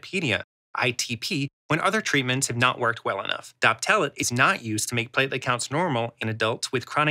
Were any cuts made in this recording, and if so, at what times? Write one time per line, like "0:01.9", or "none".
0:03.4
0:04.2
0:06.2